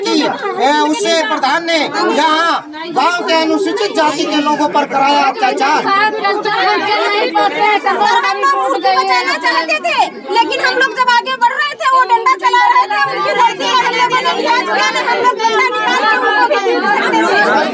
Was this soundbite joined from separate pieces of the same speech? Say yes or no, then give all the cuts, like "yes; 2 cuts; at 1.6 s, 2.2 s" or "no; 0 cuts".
no; 0 cuts